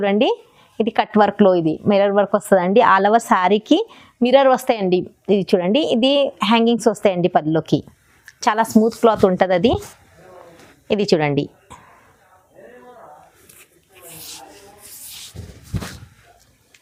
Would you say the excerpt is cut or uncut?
uncut